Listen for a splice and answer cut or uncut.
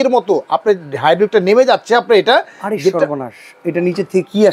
uncut